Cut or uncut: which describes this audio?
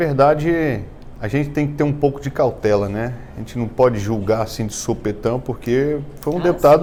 uncut